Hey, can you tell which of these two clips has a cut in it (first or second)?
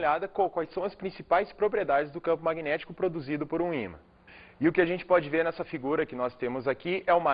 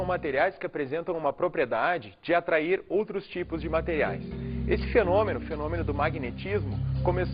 second